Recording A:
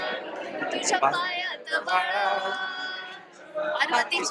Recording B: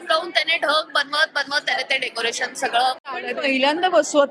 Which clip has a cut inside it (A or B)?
B